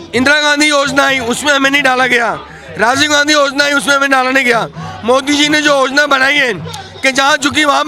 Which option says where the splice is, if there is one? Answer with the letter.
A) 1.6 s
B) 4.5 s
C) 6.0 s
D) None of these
D